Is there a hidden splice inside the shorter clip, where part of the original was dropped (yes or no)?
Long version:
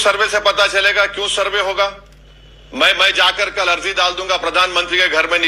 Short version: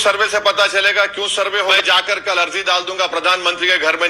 yes